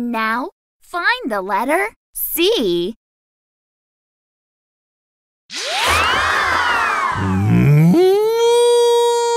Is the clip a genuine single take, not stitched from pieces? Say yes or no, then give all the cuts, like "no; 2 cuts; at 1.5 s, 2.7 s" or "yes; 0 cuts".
no; 1 cut; at 2.0 s